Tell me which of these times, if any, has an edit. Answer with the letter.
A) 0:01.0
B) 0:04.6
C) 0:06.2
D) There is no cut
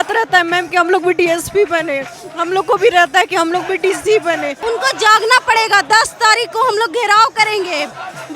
B